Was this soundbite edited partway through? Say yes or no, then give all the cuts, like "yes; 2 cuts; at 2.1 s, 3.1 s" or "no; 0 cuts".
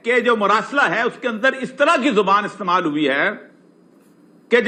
no; 0 cuts